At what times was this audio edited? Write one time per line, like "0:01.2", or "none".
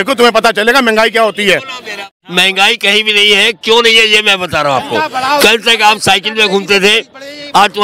0:02.1